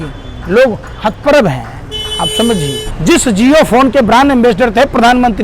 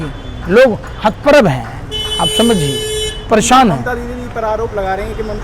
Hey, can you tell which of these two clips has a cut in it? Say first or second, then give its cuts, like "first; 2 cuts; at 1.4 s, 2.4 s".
first; 1 cut; at 2.8 s